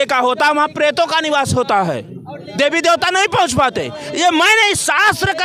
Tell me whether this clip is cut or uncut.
uncut